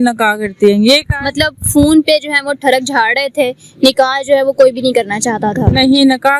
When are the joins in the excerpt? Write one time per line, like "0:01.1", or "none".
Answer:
none